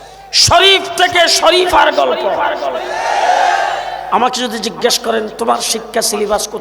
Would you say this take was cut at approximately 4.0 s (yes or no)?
yes